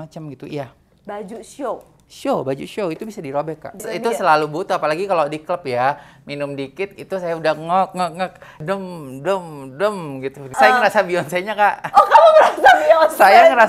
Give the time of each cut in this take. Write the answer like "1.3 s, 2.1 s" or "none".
3.8 s, 10.5 s